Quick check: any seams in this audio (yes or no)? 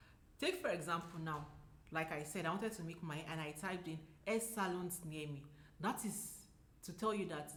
no